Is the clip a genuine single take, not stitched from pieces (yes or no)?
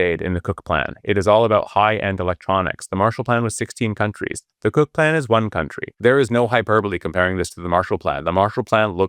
no